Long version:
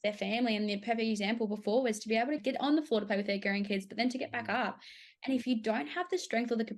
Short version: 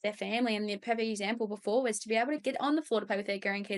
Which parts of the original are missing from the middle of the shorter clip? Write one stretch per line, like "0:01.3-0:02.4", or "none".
none